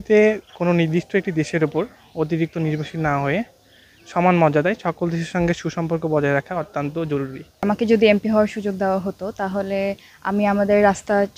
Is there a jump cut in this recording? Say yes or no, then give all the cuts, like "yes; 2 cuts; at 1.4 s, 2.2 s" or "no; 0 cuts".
yes; 1 cut; at 7.6 s